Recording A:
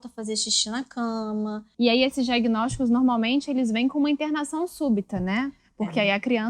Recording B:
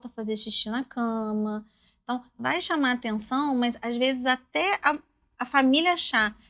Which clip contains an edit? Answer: A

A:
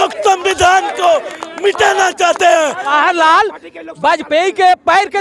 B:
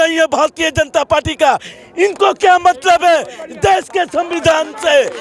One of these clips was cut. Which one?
A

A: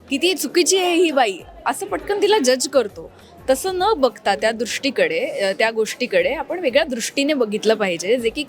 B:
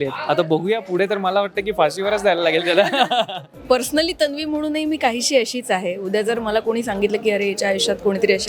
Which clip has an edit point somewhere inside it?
B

